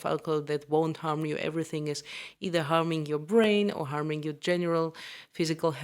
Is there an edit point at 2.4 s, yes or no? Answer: no